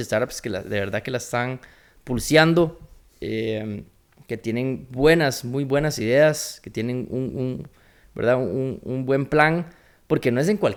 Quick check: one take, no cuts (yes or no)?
yes